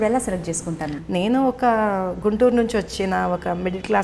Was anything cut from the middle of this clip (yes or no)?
yes